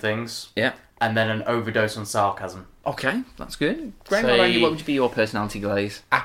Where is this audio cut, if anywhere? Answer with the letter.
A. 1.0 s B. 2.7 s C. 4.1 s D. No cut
D